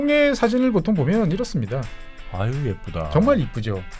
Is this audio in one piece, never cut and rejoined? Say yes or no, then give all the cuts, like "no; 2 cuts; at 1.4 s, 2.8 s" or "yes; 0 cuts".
yes; 0 cuts